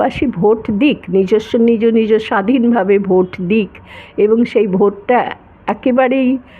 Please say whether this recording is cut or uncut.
uncut